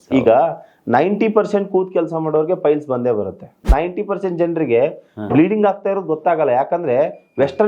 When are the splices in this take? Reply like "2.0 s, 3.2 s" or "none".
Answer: 3.6 s